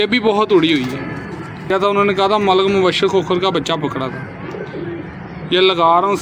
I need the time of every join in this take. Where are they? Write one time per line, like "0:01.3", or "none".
0:01.7